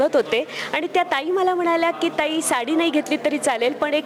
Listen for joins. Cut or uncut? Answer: uncut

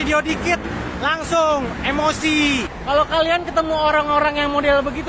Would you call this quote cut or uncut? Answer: cut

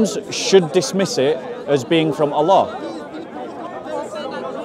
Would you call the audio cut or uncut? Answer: uncut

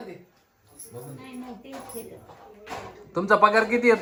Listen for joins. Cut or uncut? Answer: uncut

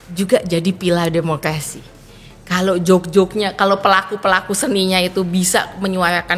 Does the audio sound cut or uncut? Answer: uncut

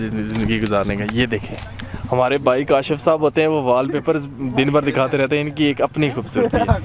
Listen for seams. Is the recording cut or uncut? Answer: uncut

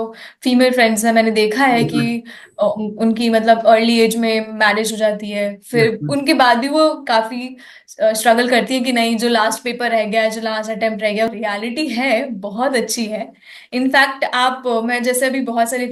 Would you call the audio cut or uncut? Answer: cut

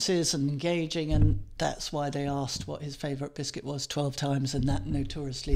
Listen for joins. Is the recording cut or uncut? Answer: uncut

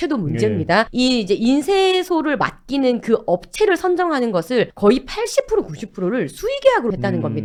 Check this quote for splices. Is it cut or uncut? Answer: uncut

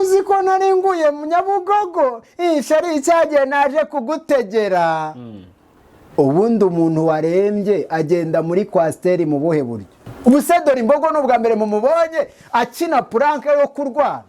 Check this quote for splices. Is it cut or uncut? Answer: cut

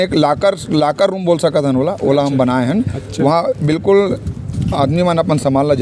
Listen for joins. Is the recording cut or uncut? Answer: uncut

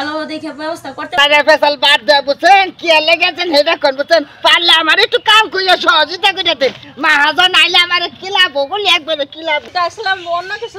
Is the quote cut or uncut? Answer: cut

